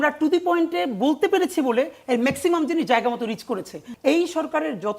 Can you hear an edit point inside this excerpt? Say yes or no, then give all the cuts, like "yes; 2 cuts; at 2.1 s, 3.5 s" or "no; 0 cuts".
yes; 1 cut; at 3.8 s